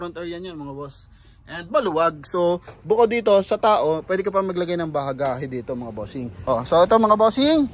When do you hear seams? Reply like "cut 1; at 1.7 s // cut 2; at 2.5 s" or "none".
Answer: cut 1; at 6.2 s

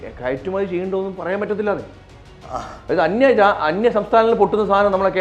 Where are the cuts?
none

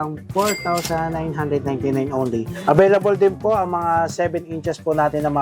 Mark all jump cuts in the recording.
cut 1; at 2.5 s

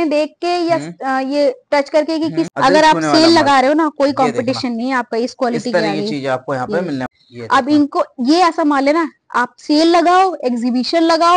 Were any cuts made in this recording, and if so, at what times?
cut 1; at 2.5 s // cut 2; at 7.1 s

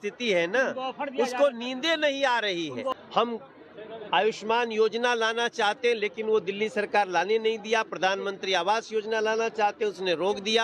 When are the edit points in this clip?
cut 1; at 2.9 s

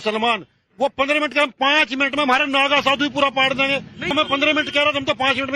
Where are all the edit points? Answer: cut 1; at 4.1 s

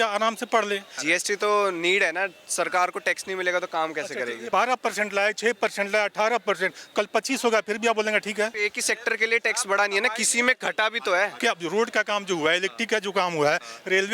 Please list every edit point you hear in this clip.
cut 1; at 0.9 s // cut 2; at 4.4 s // cut 3; at 8.5 s // cut 4; at 11.3 s

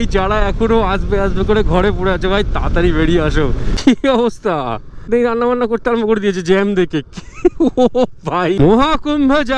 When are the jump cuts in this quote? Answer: cut 1; at 3.7 s // cut 2; at 5.1 s // cut 3; at 8.6 s

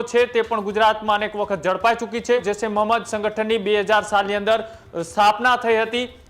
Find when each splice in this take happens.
cut 1; at 2.4 s

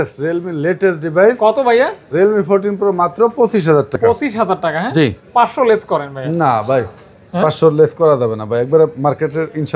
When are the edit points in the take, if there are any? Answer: none

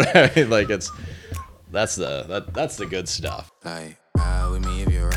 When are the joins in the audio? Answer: cut 1; at 3.4 s

